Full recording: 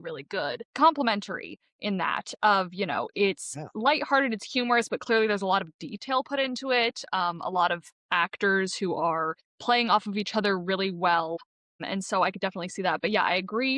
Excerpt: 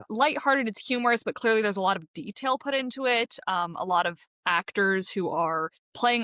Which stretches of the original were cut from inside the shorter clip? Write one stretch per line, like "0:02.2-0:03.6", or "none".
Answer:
none